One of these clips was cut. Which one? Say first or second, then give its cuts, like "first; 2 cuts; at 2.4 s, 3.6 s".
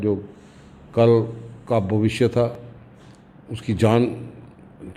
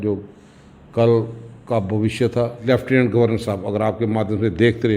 second; 1 cut; at 2.6 s